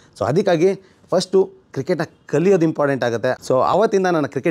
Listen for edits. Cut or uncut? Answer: cut